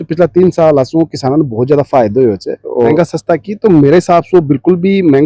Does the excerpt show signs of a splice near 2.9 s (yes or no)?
yes